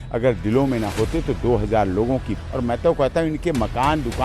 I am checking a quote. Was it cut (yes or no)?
yes